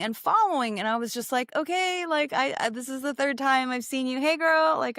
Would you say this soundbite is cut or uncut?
uncut